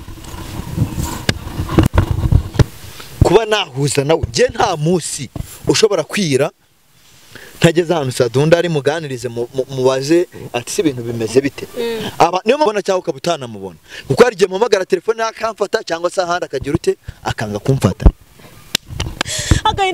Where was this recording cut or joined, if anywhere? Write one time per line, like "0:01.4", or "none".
0:02.8
0:12.7